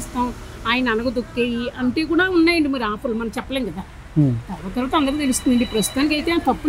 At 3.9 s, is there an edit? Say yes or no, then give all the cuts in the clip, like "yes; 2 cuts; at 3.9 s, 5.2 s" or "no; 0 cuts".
no; 0 cuts